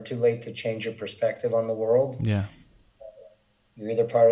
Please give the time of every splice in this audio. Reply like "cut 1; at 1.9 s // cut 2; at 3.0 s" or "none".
none